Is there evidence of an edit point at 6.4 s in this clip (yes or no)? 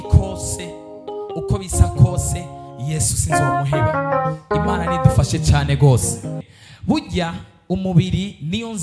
yes